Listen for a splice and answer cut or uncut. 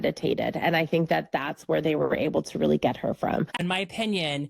cut